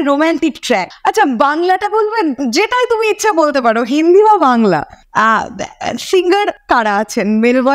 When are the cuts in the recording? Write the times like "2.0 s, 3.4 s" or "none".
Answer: 0.9 s, 5.0 s, 6.6 s